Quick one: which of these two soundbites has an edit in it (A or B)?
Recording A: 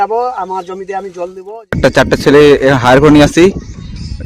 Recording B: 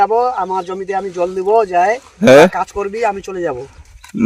A